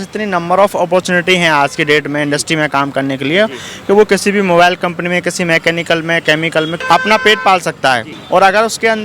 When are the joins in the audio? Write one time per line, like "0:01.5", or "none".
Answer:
0:06.7
0:08.1

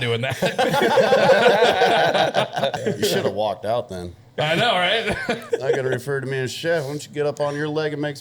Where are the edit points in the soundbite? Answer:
0:02.8
0:05.4

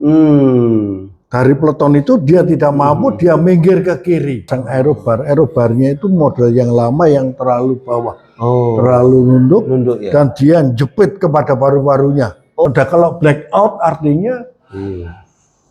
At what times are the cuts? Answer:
0:04.5
0:12.7

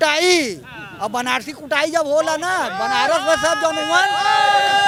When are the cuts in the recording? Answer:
none

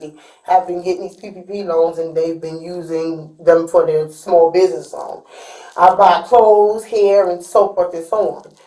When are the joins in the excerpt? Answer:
none

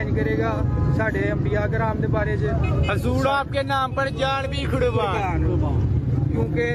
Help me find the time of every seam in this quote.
none

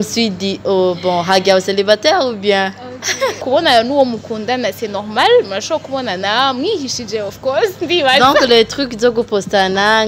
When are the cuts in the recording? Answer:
0:03.4

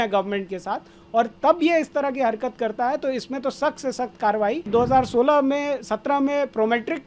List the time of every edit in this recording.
0:04.7

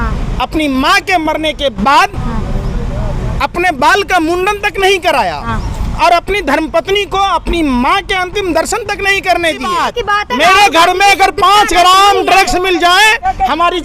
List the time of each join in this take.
0:09.9

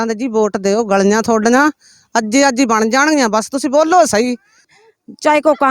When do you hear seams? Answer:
0:04.7

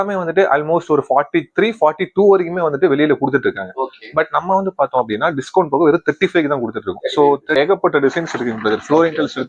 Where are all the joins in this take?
0:07.4

